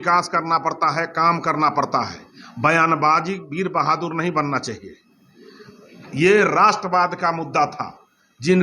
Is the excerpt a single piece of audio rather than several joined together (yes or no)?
yes